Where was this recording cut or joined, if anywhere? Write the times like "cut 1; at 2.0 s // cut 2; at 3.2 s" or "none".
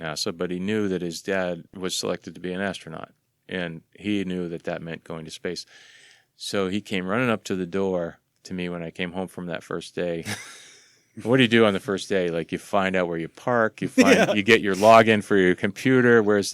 cut 1; at 1.7 s